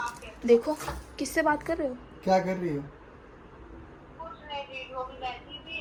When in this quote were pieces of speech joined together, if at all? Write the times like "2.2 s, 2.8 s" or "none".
none